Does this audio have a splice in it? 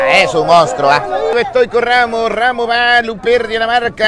yes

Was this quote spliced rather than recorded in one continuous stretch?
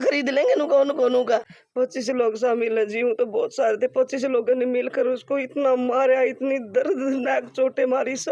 yes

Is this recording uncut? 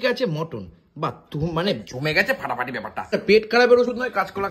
no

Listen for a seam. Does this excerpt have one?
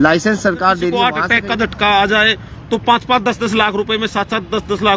yes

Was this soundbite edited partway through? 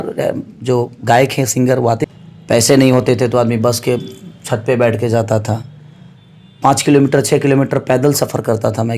yes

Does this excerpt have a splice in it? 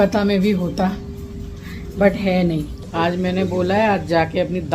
yes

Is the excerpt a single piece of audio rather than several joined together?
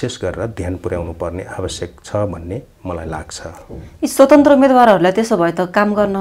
yes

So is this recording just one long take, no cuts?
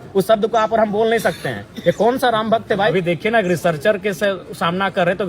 no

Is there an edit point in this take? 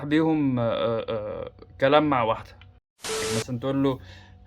yes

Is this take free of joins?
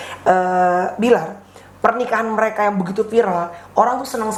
yes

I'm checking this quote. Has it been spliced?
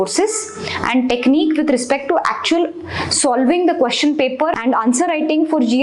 yes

